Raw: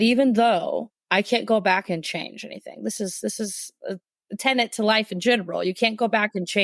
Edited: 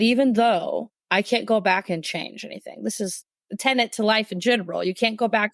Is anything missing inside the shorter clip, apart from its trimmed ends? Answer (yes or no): yes